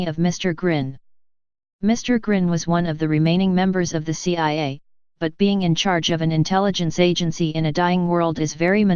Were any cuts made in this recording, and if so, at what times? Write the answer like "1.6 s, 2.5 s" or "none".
7.5 s

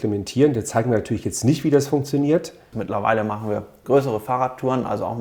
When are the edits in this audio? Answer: 2.8 s

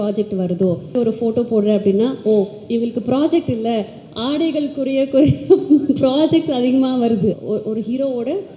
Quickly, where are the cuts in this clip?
0.9 s, 7.4 s

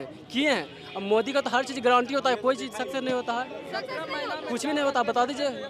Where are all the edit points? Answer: none

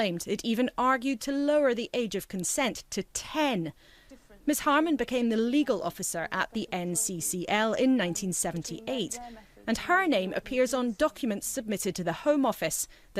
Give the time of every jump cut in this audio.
2.5 s

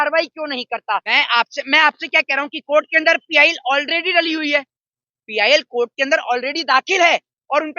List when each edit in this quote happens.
1.1 s

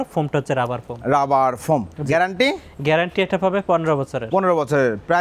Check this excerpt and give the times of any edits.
none

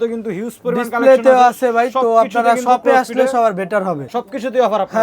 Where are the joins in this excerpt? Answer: 4.1 s

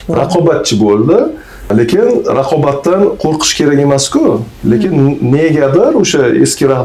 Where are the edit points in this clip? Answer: 1.7 s

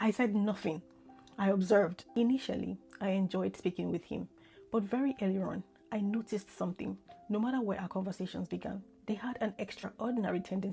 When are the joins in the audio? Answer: 2.1 s

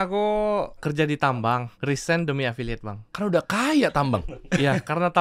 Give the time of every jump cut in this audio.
0.8 s, 1.7 s, 3.0 s

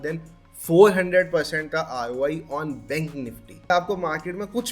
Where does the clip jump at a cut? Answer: 3.7 s

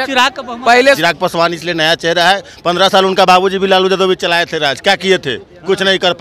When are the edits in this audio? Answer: 1.0 s

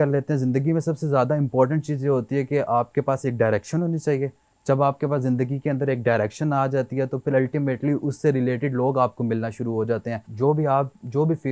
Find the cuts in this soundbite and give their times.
10.2 s

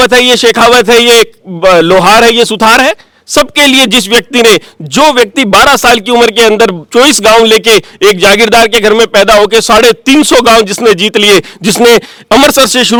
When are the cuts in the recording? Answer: none

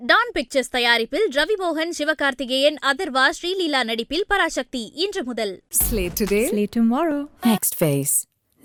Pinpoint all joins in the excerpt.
none

